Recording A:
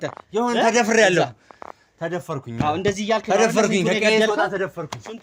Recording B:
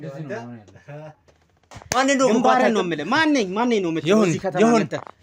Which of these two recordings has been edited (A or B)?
B